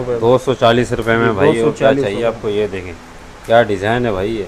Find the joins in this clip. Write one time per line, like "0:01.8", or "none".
none